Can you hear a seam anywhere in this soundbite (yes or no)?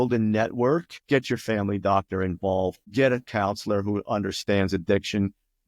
yes